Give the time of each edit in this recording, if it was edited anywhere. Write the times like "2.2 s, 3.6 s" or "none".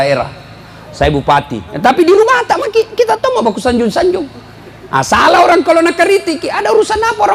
none